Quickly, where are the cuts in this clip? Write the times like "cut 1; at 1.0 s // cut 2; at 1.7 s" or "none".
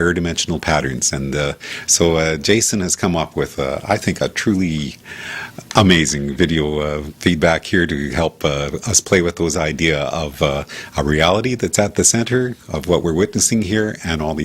cut 1; at 10.7 s